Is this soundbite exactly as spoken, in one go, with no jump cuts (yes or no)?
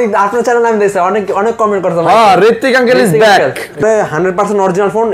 no